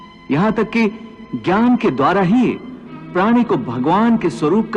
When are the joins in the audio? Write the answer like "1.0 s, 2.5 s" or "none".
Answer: none